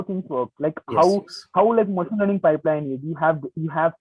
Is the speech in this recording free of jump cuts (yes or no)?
yes